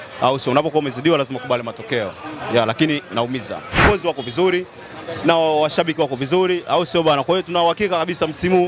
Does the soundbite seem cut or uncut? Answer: cut